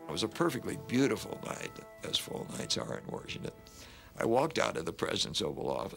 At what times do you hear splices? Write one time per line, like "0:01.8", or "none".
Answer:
0:01.9